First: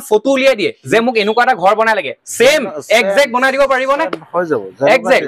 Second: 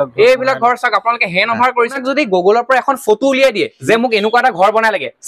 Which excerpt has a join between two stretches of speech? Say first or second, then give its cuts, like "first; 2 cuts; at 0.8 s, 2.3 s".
second; 1 cut; at 2.0 s